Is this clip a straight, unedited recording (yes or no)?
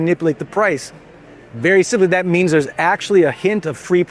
yes